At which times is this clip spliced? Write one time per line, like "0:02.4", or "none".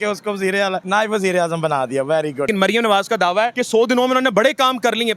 0:00.8
0:02.5
0:03.6